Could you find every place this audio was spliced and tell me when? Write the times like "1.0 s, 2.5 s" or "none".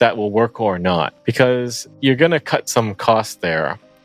1.2 s, 1.8 s